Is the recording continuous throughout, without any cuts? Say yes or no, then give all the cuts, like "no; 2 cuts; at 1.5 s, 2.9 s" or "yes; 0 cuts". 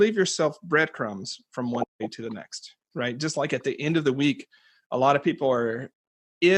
yes; 0 cuts